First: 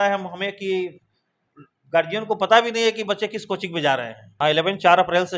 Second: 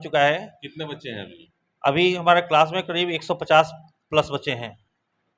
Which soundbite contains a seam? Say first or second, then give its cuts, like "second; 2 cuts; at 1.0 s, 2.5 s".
first; 1 cut; at 4.2 s